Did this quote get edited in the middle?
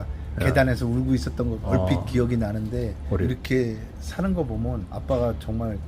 yes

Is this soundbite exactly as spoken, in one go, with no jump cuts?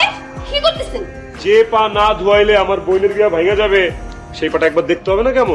no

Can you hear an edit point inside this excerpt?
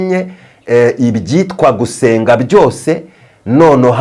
no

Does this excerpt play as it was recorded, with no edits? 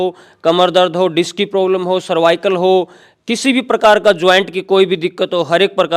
yes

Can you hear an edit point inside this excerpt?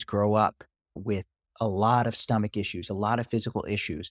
yes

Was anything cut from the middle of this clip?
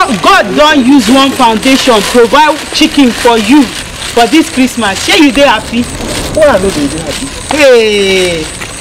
no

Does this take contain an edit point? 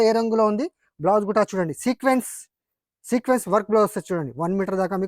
no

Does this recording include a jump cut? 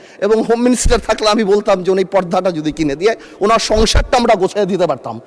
no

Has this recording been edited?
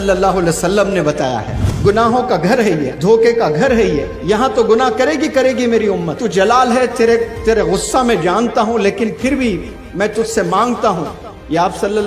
yes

